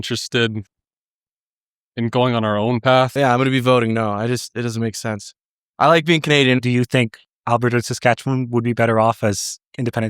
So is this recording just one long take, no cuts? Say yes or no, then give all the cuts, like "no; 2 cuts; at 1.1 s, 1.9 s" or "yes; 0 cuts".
no; 2 cuts; at 3.1 s, 6.6 s